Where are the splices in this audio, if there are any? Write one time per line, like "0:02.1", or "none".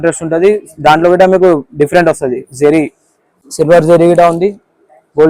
none